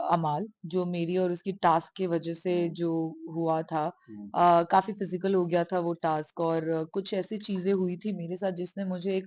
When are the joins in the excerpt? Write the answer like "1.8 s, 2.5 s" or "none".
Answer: none